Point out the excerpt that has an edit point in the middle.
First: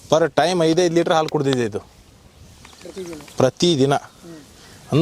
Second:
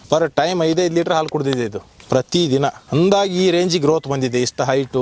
second; 2 cuts; at 1.9 s, 2.8 s

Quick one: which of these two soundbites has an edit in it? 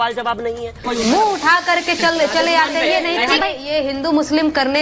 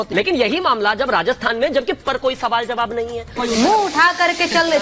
first; 1 cut; at 3.4 s

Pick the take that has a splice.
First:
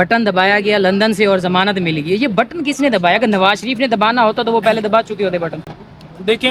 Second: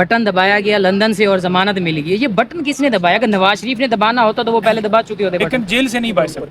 second; 1 cut; at 5.5 s

